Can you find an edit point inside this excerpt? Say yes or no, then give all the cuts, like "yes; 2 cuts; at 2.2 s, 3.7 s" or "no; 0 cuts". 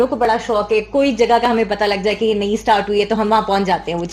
no; 0 cuts